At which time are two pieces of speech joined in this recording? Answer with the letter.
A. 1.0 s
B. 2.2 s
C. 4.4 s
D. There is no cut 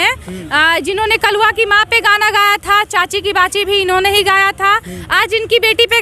D